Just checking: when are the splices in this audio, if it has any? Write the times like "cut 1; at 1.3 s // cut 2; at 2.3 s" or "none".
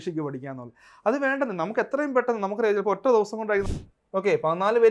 cut 1; at 3.7 s